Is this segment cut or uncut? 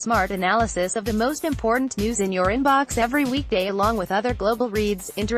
uncut